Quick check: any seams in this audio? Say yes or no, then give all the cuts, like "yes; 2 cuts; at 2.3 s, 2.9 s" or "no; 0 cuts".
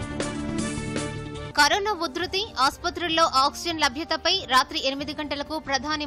no; 0 cuts